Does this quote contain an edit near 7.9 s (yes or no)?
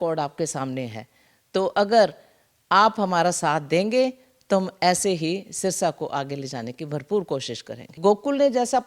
yes